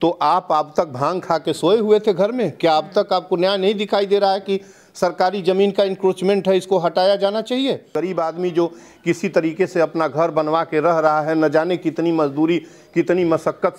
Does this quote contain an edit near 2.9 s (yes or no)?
no